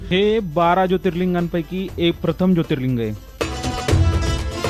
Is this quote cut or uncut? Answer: uncut